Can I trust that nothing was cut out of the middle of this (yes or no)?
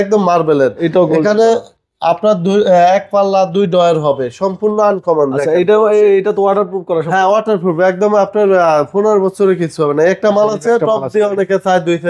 yes